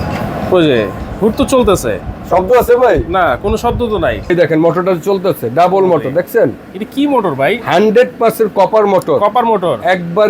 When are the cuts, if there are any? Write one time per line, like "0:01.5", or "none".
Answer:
0:04.3